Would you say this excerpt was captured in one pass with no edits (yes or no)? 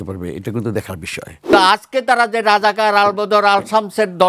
no